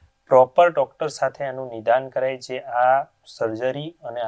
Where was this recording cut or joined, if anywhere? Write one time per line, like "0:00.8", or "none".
none